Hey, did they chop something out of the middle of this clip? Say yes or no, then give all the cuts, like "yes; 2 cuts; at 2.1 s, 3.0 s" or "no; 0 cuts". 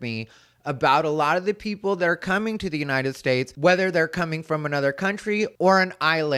no; 0 cuts